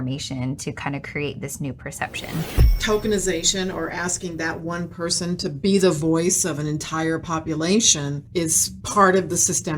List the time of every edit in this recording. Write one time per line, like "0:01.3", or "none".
0:02.8